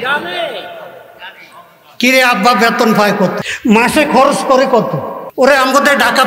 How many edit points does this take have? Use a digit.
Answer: 2